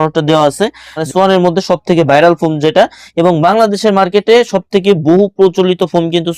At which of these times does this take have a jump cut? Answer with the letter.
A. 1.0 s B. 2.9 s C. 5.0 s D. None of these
A